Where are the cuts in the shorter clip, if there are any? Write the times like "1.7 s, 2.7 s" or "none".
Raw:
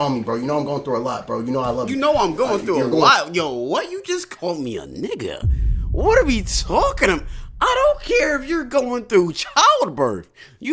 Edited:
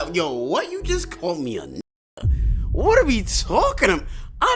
none

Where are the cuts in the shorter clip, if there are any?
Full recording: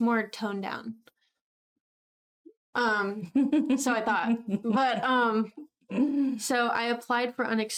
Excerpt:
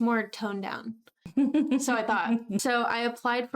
1.2 s, 2.6 s

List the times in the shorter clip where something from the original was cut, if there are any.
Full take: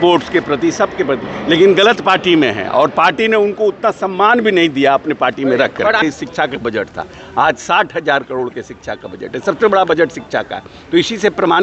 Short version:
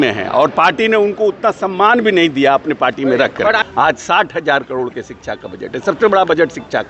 3.6 s

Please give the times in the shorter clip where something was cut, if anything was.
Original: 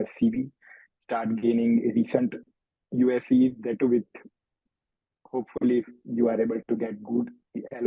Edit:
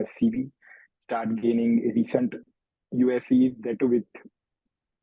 none

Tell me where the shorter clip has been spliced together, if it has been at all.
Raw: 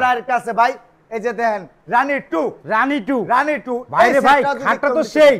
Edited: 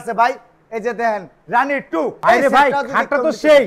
2.2 s

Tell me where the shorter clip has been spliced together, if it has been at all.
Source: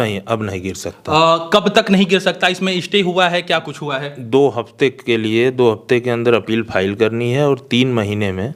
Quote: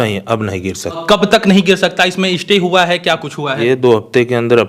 1.0 s, 3.6 s

